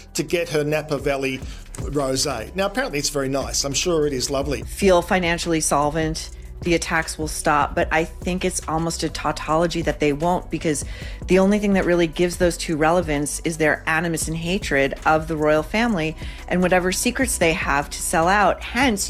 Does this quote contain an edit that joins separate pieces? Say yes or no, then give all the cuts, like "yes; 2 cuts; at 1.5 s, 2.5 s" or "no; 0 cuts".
no; 0 cuts